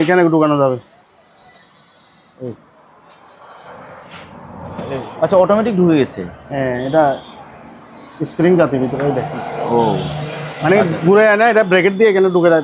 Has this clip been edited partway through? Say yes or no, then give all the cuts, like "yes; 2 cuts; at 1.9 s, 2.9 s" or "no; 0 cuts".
no; 0 cuts